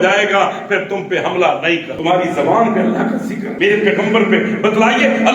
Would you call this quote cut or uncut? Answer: cut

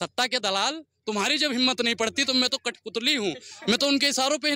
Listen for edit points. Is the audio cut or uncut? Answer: uncut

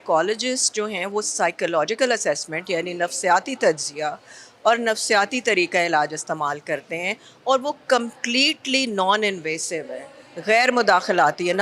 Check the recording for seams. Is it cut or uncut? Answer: uncut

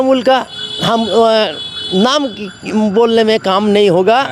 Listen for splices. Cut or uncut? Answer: uncut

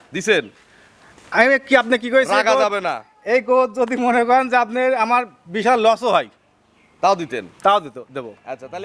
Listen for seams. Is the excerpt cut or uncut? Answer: uncut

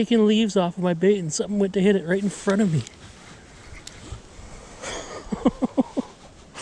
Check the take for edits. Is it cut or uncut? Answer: uncut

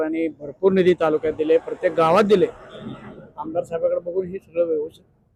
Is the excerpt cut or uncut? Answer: uncut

